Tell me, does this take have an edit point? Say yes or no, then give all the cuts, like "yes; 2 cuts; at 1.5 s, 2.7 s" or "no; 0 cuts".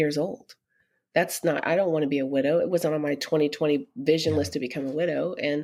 no; 0 cuts